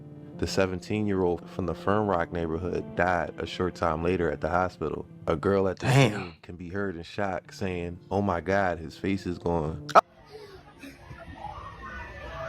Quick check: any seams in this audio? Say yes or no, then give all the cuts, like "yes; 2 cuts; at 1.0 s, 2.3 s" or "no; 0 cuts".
yes; 2 cuts; at 5.1 s, 10.0 s